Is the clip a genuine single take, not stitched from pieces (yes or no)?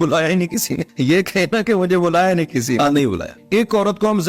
no